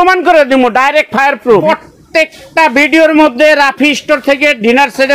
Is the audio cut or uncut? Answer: cut